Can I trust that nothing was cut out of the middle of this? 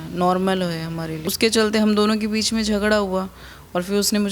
no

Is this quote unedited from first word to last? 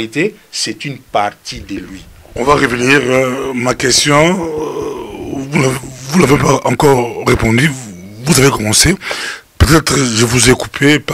yes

